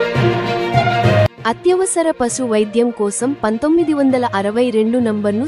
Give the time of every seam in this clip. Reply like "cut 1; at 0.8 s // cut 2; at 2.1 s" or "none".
none